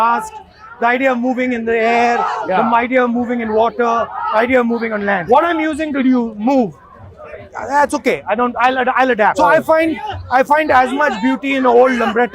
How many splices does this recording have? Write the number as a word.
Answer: two